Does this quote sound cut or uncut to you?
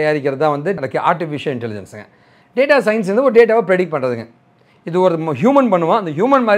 uncut